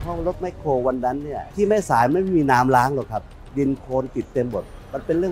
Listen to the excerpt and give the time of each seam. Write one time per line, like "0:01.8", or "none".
0:01.4
0:03.4